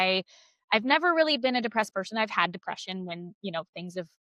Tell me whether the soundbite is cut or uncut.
uncut